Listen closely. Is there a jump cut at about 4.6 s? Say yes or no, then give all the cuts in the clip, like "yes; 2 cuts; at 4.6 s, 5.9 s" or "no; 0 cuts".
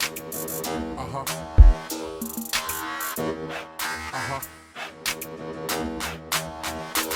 no; 0 cuts